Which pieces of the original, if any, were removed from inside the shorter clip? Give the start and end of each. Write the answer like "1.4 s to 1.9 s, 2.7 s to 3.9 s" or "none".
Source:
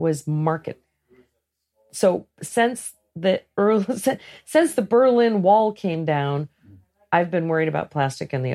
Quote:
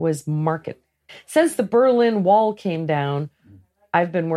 1.1 s to 4.3 s